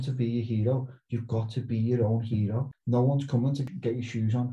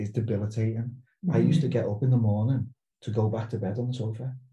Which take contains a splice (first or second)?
first